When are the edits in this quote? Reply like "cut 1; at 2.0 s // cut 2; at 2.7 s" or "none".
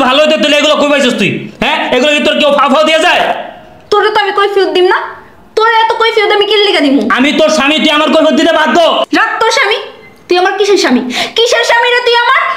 none